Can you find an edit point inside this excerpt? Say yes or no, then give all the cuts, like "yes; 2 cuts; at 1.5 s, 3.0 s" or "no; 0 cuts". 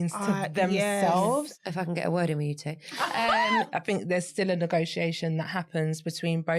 yes; 2 cuts; at 1.5 s, 3.7 s